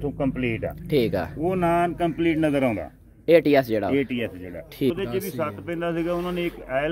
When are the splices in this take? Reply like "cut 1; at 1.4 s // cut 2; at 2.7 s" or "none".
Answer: cut 1; at 4.9 s